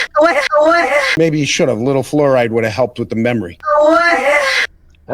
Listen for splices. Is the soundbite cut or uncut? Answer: cut